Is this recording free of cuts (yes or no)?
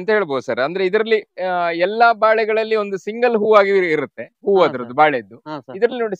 yes